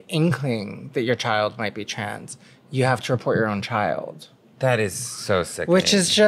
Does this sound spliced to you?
no; 0 cuts

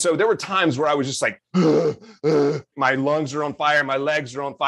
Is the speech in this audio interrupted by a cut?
yes; 2 cuts; at 1.4 s, 2.7 s

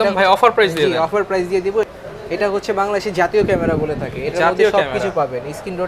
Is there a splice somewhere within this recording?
yes; 1 cut; at 1.9 s

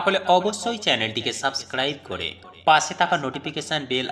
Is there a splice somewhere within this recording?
no; 0 cuts

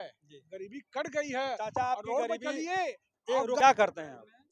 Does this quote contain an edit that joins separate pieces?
yes; 1 cut; at 3.6 s

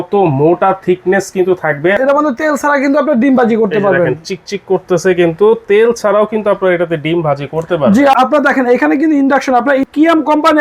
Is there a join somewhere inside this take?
yes; 3 cuts; at 2.0 s, 8.1 s, 9.8 s

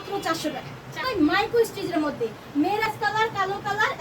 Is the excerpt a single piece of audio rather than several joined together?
no; 2 cuts; at 1.1 s, 2.9 s

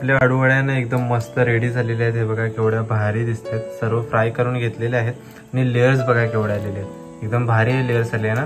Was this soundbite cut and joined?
no; 0 cuts

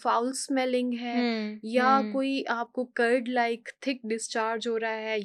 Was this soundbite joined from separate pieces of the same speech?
no; 0 cuts

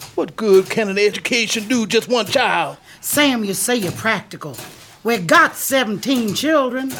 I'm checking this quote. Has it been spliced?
yes; 2 cuts; at 1.2 s, 2.8 s

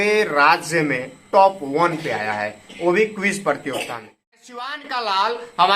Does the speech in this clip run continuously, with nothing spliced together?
no; 1 cut; at 4.3 s

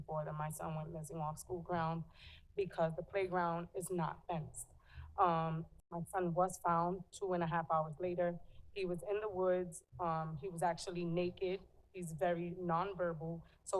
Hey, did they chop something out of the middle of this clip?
yes; 1 cut; at 5.8 s

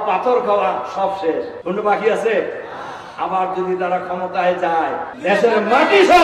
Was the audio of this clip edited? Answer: yes; 2 cuts; at 1.6 s, 5.1 s

